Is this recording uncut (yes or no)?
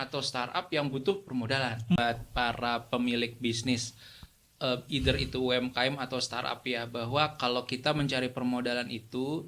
no